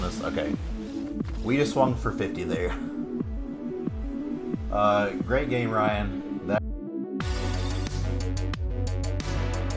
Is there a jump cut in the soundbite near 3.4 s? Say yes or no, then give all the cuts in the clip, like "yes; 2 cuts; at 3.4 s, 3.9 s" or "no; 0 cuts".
no; 1 cut; at 6.6 s